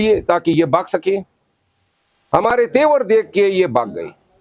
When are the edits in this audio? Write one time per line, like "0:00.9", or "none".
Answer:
none